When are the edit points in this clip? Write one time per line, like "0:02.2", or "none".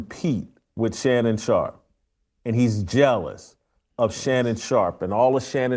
none